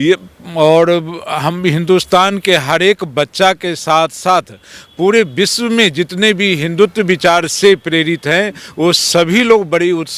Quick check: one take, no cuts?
yes; 0 cuts

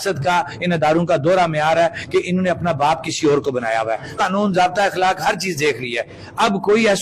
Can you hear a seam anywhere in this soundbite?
yes; 1 cut; at 4.1 s

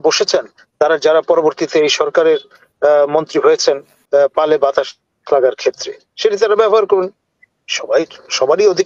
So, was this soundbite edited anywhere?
yes; 1 cut; at 3.9 s

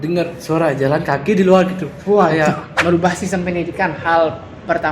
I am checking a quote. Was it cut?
yes; 1 cut; at 2.7 s

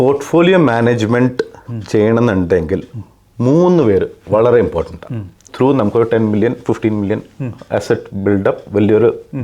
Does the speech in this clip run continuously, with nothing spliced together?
no; 1 cut; at 5.5 s

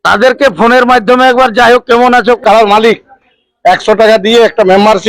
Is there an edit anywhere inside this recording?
yes; 1 cut; at 2.4 s

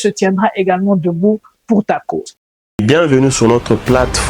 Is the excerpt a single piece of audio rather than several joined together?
no; 1 cut; at 2.4 s

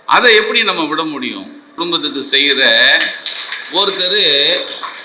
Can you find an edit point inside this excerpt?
yes; 1 cut; at 1.7 s

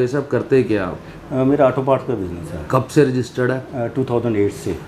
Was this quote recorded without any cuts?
yes; 0 cuts

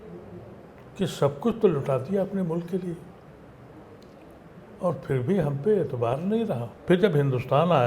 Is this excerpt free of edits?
no; 1 cut; at 6.7 s

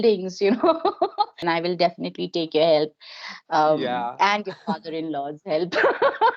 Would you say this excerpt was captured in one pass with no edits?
no; 1 cut; at 1.4 s

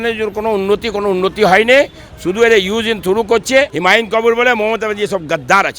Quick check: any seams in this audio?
yes; 1 cut; at 3.7 s

